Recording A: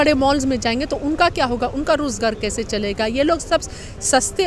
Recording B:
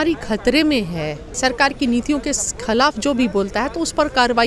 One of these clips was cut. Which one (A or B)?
B